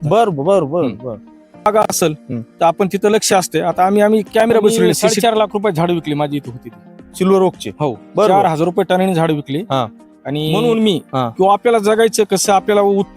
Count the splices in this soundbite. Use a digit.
3